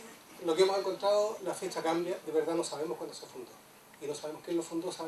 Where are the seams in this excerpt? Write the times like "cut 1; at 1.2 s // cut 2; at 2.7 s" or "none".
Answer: cut 1; at 2.5 s